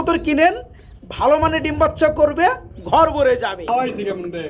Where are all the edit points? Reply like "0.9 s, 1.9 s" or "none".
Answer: 3.6 s